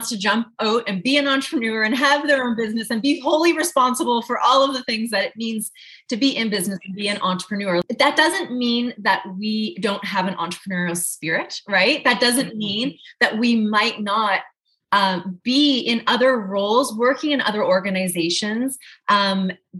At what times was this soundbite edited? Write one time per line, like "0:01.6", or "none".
0:07.8